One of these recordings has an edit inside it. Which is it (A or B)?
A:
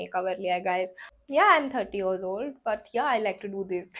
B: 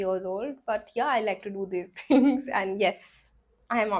A